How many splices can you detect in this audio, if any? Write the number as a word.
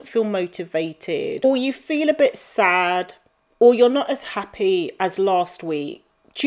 one